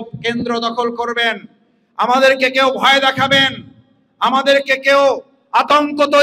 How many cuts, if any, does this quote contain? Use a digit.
0